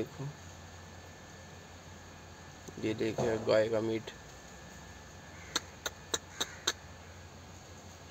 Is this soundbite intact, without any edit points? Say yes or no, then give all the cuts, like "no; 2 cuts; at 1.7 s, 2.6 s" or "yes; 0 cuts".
yes; 0 cuts